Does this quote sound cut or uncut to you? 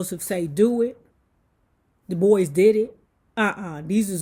uncut